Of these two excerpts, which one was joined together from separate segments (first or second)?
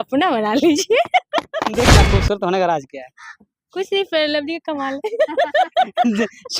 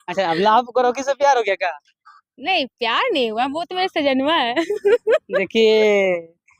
first